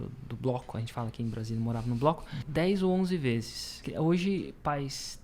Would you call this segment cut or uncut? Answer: cut